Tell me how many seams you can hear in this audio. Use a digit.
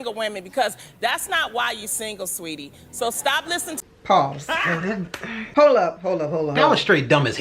1